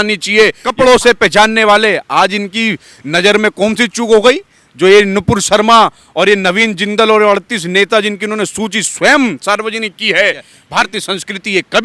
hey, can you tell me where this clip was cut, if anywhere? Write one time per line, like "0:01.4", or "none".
0:00.7
0:10.5